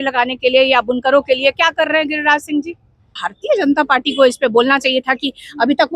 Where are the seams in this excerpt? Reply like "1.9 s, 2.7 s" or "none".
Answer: 3.1 s